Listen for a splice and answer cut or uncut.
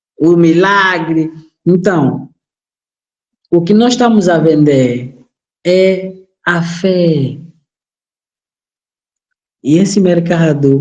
uncut